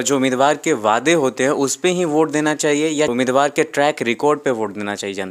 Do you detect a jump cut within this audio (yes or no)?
yes